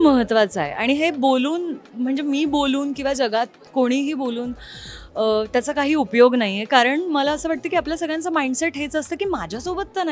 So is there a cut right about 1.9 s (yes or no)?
no